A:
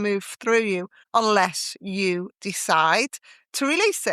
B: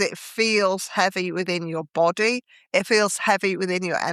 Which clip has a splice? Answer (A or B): A